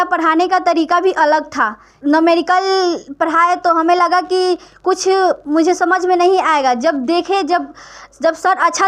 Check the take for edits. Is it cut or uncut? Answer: uncut